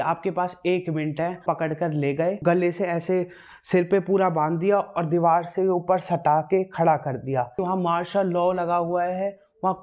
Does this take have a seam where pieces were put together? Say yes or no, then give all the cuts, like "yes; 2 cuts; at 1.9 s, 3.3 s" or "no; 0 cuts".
yes; 3 cuts; at 1.4 s, 2.4 s, 7.5 s